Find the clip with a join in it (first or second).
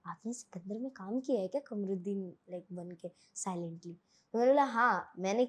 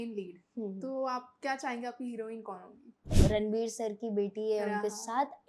second